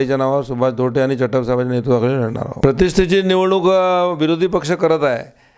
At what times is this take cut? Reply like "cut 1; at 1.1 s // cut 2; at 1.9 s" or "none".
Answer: cut 1; at 2.4 s